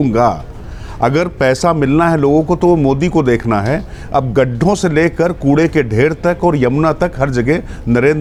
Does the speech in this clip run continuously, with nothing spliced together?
yes; 0 cuts

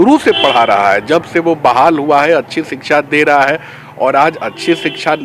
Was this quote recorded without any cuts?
yes; 0 cuts

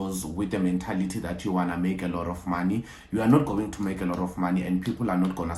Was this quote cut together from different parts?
no; 0 cuts

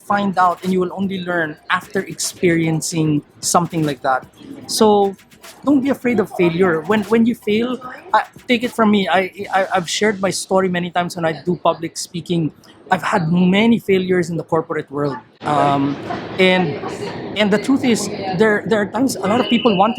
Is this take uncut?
yes; 0 cuts

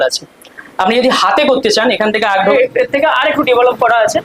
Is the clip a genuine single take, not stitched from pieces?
no; 1 cut; at 2.5 s

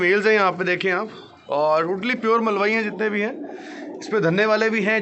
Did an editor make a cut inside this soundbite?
no; 0 cuts

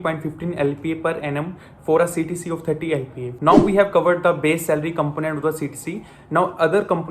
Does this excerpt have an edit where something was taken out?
yes; 1 cut; at 3.2 s

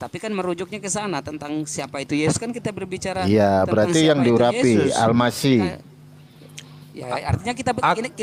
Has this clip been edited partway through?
no; 0 cuts

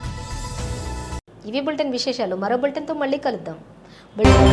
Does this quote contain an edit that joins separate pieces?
no; 0 cuts

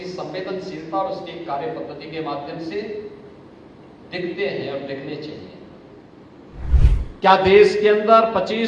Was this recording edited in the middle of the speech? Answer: yes; 1 cut; at 6.7 s

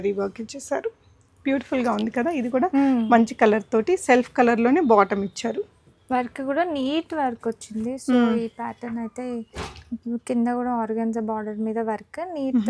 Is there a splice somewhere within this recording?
no; 0 cuts

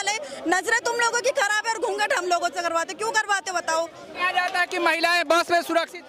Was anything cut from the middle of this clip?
yes; 1 cut; at 4.2 s

